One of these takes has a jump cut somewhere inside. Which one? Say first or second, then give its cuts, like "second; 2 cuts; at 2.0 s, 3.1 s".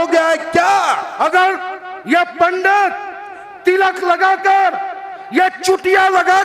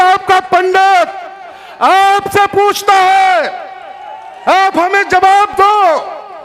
first; 1 cut; at 1.1 s